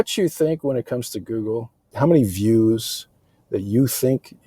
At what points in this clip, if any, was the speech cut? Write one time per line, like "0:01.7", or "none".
0:01.9